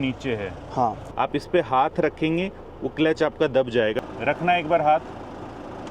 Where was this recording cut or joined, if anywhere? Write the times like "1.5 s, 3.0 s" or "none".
1.0 s, 4.0 s